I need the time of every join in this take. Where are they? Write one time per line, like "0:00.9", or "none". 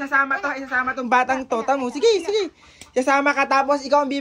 none